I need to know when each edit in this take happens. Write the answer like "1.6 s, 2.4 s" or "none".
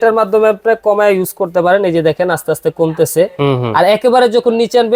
none